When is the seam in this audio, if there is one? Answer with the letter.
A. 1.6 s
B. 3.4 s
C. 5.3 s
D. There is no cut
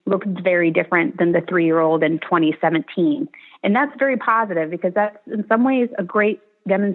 D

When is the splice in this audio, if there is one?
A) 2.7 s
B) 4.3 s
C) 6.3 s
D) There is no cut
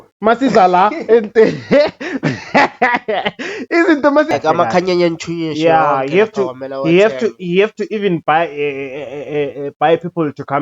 B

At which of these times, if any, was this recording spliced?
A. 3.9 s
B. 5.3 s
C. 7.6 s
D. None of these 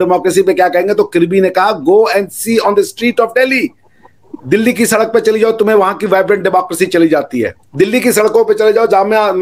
C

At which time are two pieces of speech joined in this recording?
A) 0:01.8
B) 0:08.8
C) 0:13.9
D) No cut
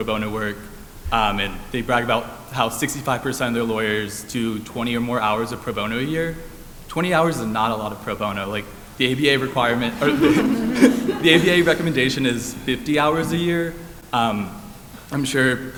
D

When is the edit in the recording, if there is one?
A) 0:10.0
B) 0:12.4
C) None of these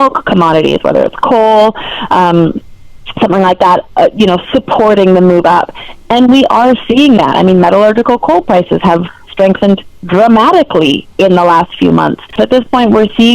B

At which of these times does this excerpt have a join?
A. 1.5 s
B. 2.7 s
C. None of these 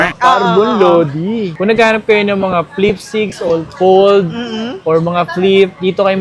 A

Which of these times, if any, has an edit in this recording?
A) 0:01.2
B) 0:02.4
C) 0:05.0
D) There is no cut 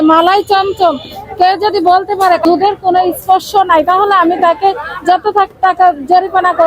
B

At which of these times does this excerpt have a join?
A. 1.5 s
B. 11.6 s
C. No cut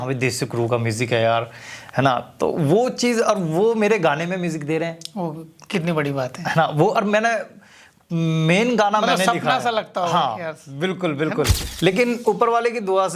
B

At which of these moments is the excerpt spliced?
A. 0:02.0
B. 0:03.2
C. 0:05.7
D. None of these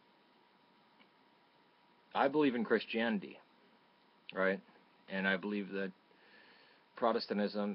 D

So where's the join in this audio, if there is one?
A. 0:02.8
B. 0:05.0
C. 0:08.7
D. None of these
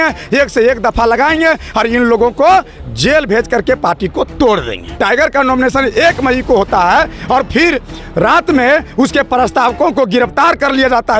B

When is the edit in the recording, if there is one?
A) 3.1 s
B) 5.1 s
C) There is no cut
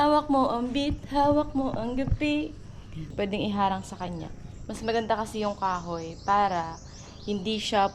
A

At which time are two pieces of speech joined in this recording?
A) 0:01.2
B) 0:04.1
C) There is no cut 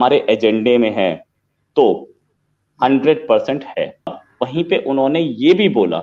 B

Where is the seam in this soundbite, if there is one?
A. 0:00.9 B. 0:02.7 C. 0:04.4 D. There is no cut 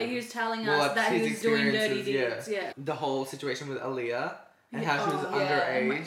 B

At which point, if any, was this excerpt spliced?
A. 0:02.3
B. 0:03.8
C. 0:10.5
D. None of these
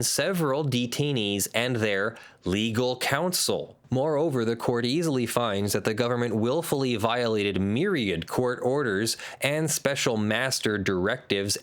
B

